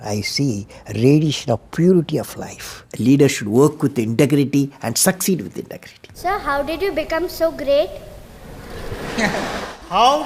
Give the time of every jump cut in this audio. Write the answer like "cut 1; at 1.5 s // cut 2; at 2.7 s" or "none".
cut 1; at 2.8 s // cut 2; at 6.2 s